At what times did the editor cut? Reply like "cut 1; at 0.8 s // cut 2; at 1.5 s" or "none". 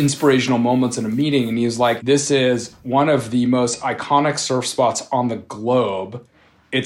cut 1; at 2.0 s